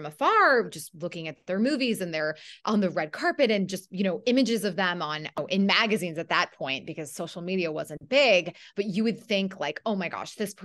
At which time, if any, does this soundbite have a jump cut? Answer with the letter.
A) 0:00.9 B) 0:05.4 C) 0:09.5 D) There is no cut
B